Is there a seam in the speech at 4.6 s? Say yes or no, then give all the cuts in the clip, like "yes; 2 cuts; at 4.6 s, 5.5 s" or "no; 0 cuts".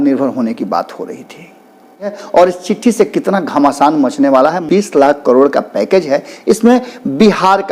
yes; 2 cuts; at 2.2 s, 4.6 s